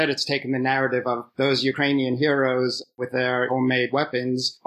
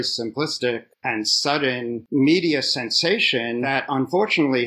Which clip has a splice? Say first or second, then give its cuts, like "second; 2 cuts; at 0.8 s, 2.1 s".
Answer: second; 2 cuts; at 2.0 s, 3.7 s